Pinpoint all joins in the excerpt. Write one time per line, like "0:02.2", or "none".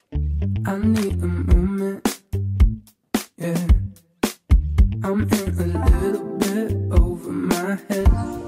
none

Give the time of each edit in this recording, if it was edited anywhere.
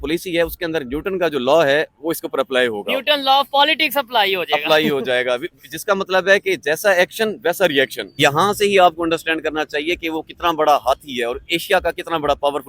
0:08.1

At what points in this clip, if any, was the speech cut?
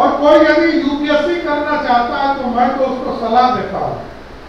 none

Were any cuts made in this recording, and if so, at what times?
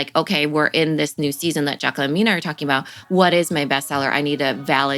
none

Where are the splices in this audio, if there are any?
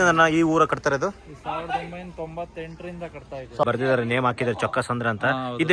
0:03.6

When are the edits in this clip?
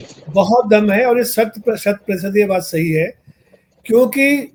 none

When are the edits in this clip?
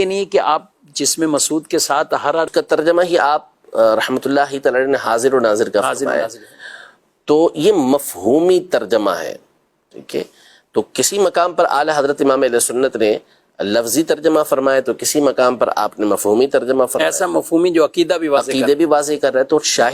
0:02.5

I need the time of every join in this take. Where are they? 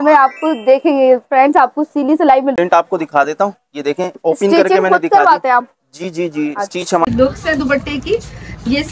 0:02.5
0:07.1

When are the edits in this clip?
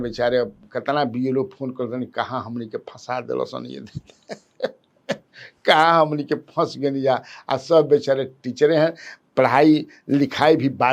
none

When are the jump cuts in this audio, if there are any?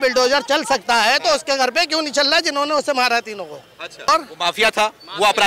0:04.1

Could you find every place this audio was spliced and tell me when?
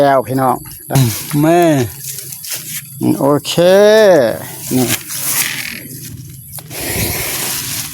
0:01.0

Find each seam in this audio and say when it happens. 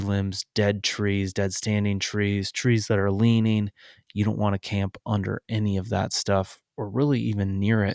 none

